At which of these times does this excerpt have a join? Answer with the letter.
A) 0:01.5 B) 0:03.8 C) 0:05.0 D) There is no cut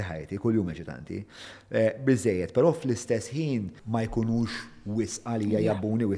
B